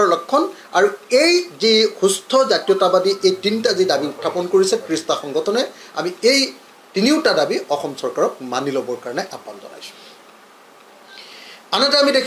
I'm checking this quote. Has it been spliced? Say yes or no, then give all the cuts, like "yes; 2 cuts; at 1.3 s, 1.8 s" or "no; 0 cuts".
no; 0 cuts